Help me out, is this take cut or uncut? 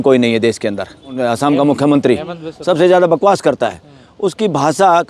cut